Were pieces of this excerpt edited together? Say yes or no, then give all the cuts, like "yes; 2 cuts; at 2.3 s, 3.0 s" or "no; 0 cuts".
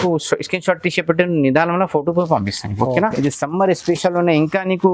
yes; 1 cut; at 3.1 s